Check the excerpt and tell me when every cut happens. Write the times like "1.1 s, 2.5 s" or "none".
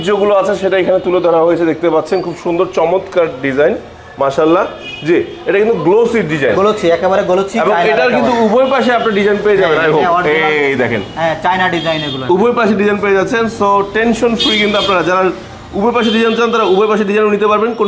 none